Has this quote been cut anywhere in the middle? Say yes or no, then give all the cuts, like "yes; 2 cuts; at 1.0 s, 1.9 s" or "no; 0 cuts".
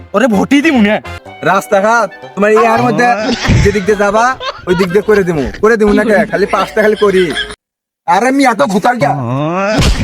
yes; 2 cuts; at 1.2 s, 7.5 s